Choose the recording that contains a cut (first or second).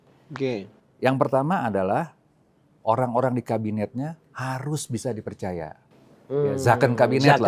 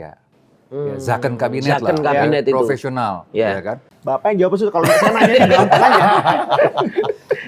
second